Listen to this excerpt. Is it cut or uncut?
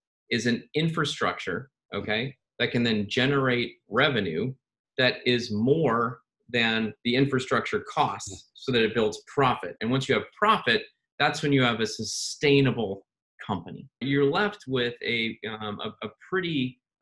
cut